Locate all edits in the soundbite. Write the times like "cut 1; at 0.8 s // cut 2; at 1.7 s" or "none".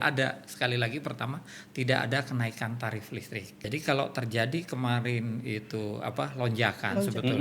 cut 1; at 3.6 s

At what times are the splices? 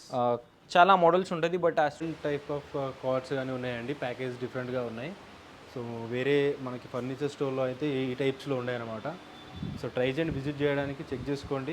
cut 1; at 2.0 s

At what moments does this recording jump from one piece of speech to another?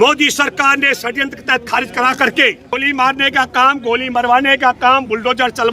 cut 1; at 2.8 s

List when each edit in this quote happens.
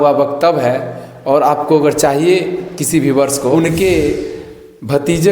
cut 1; at 3.5 s

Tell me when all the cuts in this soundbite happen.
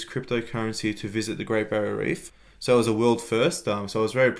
cut 1; at 2.3 s

